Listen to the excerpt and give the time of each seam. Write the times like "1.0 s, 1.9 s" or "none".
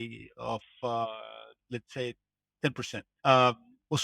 3.0 s